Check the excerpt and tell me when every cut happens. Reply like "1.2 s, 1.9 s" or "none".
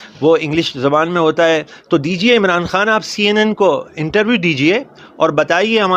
none